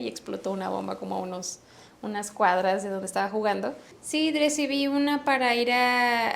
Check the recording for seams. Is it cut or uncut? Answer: cut